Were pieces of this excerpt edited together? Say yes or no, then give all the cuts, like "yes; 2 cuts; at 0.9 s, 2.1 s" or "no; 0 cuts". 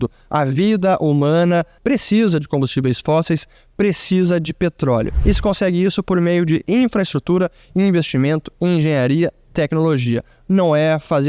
yes; 2 cuts; at 1.7 s, 5.1 s